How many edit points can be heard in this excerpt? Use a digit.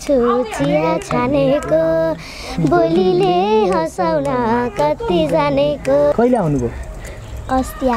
1